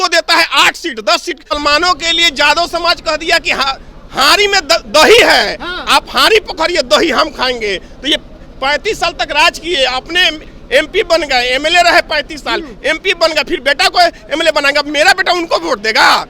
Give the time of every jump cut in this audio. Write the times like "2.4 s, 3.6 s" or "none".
1.5 s